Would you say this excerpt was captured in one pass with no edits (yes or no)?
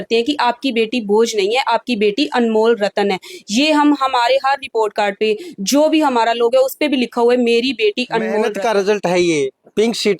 no